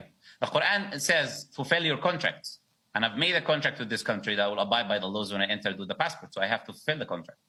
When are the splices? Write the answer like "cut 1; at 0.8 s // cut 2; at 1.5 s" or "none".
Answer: none